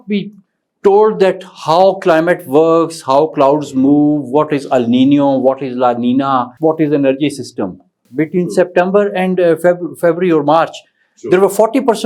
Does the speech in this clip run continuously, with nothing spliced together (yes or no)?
no